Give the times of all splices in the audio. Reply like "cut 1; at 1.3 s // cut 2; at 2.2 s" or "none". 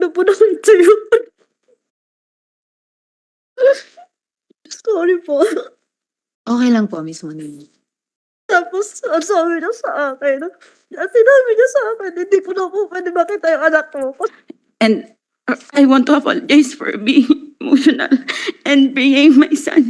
cut 1; at 14.2 s